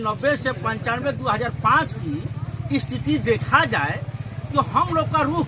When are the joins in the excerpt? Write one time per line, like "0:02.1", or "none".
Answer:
none